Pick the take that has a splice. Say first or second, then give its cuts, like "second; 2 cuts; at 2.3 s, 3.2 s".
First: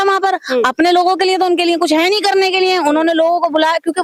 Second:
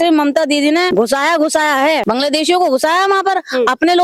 second; 2 cuts; at 0.9 s, 2.0 s